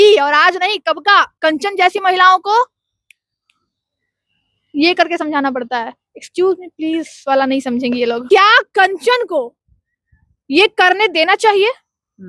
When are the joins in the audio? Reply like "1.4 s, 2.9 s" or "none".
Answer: 1.3 s, 8.2 s